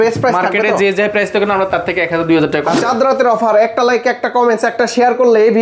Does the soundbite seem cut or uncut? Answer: cut